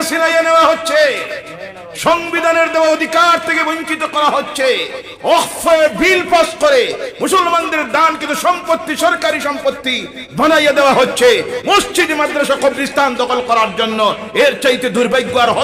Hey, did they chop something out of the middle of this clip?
no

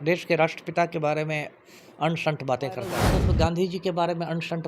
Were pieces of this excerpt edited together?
yes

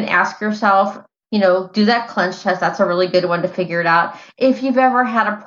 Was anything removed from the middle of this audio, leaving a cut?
yes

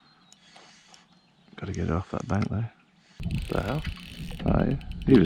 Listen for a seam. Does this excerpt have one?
yes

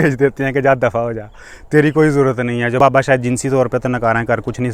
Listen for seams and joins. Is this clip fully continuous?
no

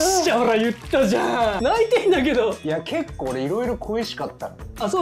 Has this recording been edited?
yes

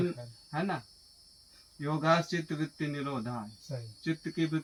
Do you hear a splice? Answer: no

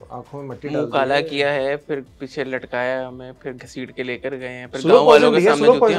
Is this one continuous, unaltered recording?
yes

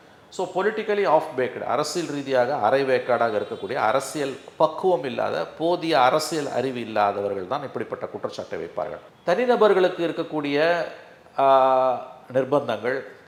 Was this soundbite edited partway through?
no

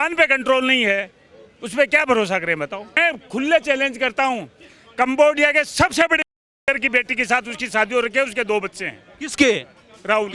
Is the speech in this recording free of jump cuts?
no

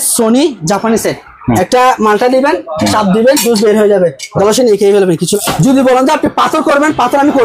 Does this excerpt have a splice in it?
yes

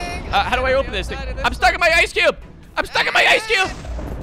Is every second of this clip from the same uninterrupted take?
yes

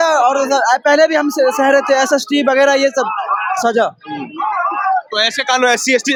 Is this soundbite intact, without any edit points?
yes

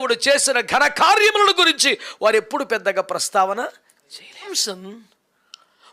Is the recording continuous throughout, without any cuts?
no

